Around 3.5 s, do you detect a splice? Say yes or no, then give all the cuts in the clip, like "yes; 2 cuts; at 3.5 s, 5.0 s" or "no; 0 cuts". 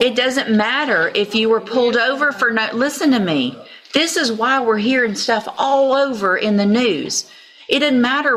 no; 0 cuts